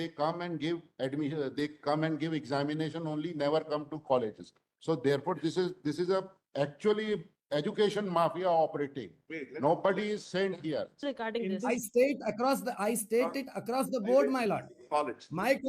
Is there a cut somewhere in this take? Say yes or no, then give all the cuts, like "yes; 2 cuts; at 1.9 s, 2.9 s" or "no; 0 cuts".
yes; 1 cut; at 11.0 s